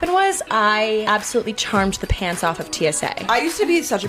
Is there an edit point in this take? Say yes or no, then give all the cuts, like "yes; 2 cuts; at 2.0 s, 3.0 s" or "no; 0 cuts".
yes; 2 cuts; at 1.0 s, 3.2 s